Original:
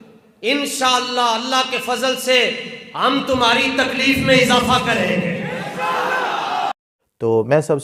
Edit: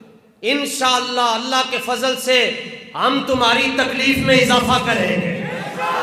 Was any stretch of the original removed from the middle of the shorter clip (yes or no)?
no